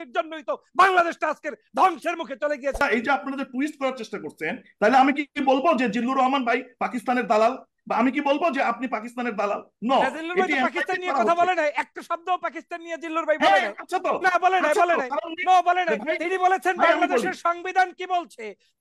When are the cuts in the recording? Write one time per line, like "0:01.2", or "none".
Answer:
0:02.8